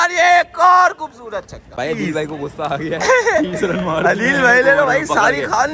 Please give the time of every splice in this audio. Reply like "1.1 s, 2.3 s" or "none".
1.6 s